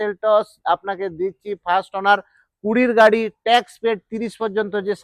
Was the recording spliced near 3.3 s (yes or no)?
no